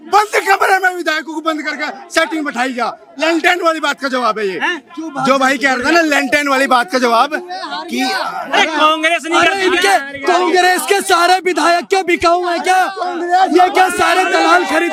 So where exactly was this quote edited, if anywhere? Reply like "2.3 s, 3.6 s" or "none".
none